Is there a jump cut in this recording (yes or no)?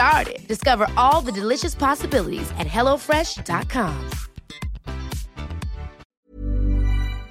yes